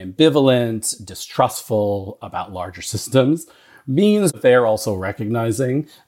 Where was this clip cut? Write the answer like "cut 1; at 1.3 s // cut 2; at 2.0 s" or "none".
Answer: cut 1; at 4.3 s